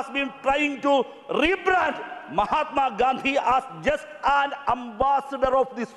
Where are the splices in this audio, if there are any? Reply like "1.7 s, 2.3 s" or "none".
none